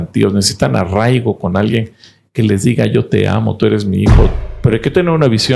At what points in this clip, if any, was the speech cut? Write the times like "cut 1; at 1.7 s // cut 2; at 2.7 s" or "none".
cut 1; at 4.5 s